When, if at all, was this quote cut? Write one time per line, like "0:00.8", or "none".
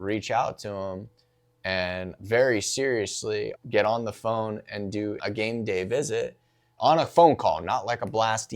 0:02.1
0:03.5
0:05.2
0:06.8